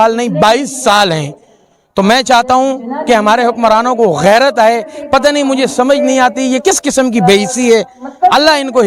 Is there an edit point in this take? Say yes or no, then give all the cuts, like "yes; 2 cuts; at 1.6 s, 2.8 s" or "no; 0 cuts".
no; 0 cuts